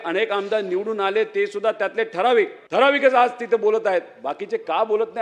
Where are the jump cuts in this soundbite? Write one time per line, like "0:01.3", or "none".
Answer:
0:02.6